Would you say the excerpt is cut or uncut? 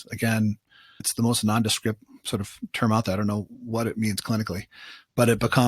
cut